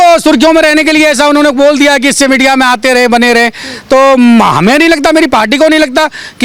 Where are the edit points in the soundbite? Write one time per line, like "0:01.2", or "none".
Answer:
none